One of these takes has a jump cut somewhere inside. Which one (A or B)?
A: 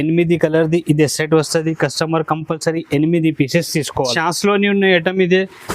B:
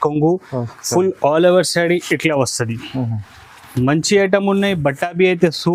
A